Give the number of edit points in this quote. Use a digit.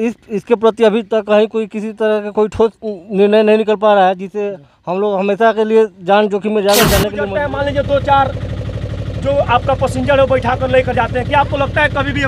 1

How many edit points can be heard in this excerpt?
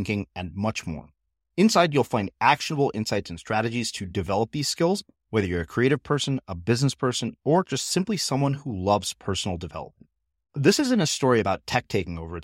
0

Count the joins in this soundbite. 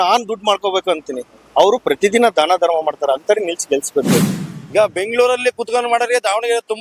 1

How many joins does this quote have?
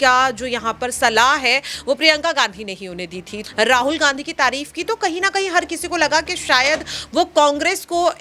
1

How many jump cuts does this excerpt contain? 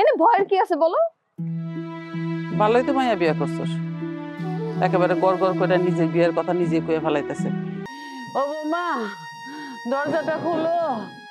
1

